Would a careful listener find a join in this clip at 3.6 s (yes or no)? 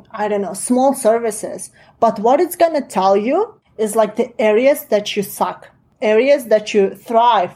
yes